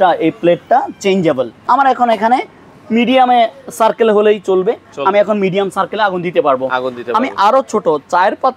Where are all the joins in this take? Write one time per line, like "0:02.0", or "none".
0:01.5